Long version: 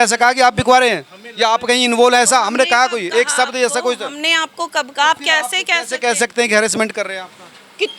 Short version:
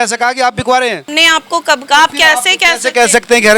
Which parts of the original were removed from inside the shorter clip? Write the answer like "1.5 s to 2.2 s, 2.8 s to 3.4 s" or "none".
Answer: 1.1 s to 4.1 s